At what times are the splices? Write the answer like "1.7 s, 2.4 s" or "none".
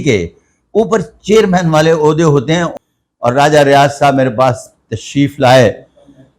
2.7 s